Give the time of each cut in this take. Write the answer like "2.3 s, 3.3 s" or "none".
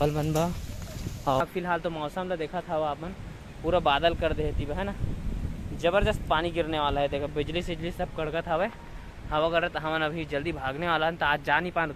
1.4 s